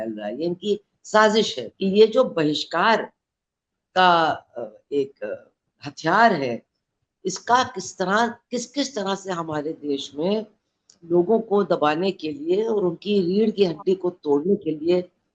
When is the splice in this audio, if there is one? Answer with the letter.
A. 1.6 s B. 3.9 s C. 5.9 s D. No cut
A